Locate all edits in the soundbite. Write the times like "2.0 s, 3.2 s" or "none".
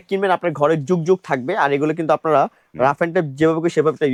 none